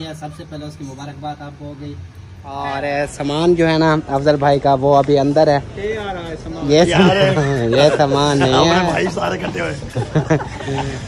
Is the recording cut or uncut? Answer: cut